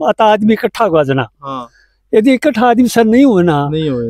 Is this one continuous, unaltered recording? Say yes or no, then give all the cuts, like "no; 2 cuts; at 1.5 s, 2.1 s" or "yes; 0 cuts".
yes; 0 cuts